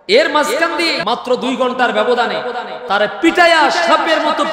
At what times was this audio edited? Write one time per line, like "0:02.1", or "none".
0:01.0